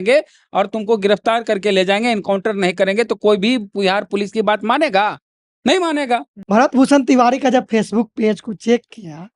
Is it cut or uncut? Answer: cut